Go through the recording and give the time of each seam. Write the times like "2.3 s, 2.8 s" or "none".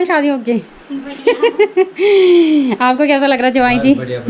none